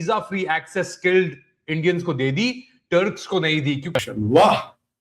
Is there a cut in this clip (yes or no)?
yes